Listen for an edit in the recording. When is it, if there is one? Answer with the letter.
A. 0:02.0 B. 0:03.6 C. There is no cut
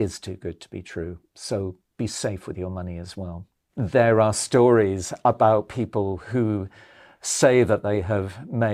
B